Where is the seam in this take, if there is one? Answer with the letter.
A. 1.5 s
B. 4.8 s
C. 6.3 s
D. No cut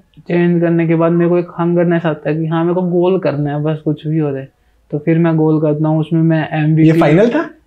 D